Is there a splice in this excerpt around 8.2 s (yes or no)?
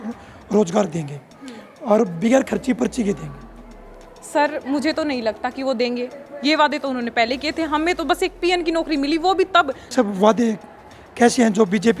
no